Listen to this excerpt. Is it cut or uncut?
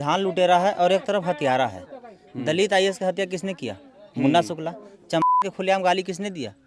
uncut